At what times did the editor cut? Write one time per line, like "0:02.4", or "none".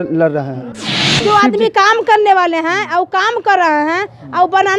0:01.2